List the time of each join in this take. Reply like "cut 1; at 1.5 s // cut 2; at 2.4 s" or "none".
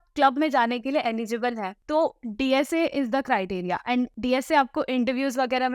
cut 1; at 1.7 s // cut 2; at 4.1 s